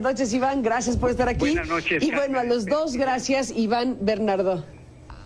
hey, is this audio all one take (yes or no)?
yes